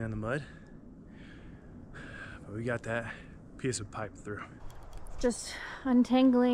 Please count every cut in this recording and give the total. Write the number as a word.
one